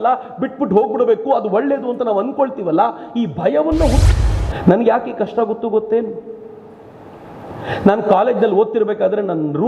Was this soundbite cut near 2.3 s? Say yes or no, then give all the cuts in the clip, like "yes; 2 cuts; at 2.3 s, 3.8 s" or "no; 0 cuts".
no; 1 cut; at 4.0 s